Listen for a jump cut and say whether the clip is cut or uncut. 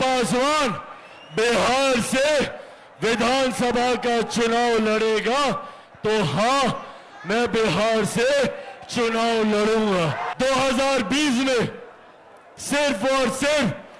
cut